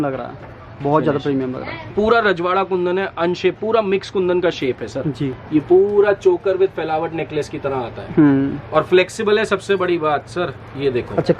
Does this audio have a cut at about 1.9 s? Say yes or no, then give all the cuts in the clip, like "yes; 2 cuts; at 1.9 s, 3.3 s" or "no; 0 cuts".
yes; 1 cut; at 1.9 s